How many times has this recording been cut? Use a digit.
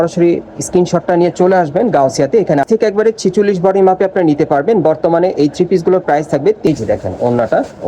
2